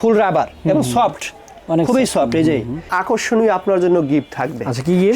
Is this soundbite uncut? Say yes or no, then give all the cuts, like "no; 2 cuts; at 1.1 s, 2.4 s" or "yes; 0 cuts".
no; 1 cut; at 2.9 s